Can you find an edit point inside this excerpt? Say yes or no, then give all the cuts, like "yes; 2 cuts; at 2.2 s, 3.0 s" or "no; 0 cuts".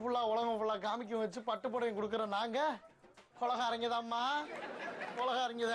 no; 0 cuts